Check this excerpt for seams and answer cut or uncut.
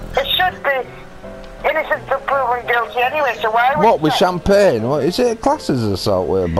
uncut